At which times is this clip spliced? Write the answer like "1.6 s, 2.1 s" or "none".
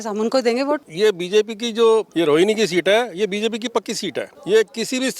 0.9 s, 2.1 s, 4.3 s